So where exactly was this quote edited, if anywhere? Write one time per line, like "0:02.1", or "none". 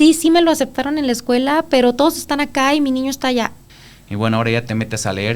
0:03.7